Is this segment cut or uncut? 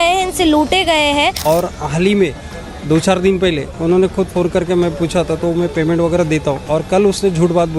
cut